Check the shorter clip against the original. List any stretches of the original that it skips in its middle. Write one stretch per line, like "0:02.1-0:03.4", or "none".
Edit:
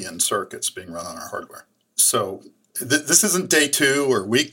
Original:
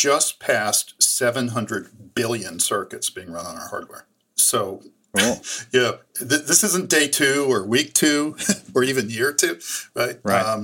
0:05.0-0:06.0